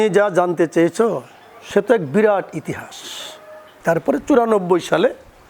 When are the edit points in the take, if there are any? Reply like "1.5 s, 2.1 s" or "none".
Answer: 3.4 s